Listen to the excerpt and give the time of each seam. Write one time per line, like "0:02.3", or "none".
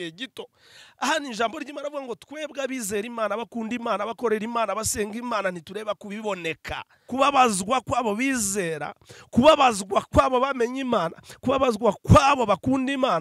0:06.9